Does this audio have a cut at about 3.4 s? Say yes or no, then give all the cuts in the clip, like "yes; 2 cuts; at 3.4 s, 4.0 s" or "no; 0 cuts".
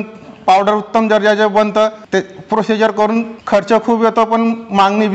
yes; 2 cuts; at 2.0 s, 3.4 s